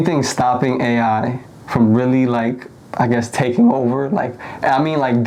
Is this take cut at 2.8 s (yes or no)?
no